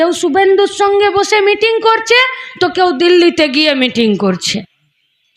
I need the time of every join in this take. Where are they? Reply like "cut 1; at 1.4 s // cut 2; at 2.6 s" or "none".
none